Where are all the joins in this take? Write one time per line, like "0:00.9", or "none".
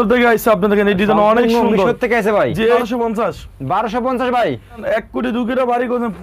0:02.8
0:04.8

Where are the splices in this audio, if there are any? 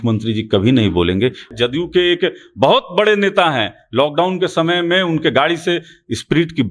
0:01.5

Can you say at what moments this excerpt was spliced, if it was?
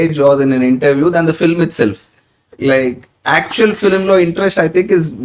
none

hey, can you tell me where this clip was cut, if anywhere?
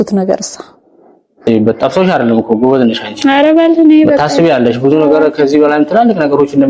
0:01.4

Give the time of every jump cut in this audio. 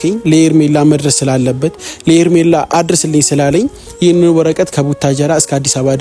none

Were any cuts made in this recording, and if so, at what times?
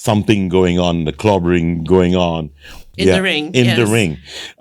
0:02.9

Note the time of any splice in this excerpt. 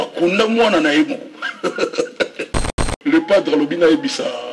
0:02.8

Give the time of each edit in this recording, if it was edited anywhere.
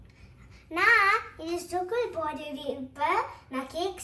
none

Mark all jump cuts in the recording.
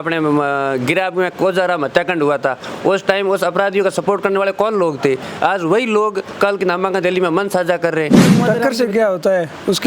0:08.3

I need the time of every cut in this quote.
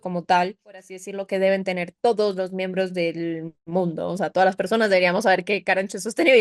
0:01.1

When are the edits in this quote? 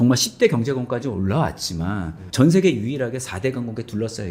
none

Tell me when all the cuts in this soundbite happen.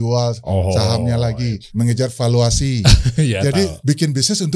0:01.6
0:03.8

